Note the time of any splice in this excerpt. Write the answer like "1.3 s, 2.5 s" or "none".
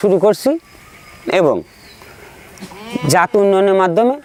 none